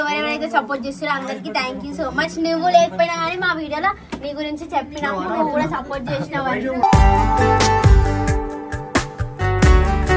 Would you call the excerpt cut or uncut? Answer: uncut